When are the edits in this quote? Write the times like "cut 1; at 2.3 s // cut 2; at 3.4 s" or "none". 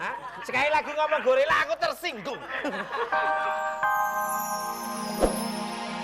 cut 1; at 3.2 s